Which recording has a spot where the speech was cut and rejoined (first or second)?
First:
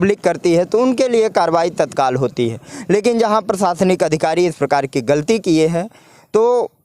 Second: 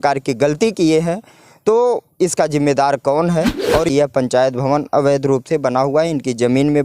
second